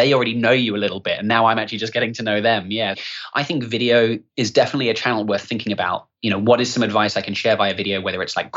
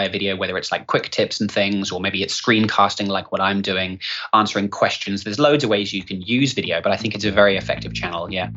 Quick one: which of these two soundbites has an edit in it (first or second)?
first